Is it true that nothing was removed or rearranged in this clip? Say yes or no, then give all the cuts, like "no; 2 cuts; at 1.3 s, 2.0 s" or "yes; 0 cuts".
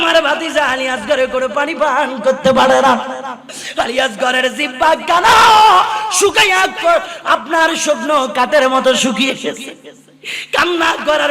yes; 0 cuts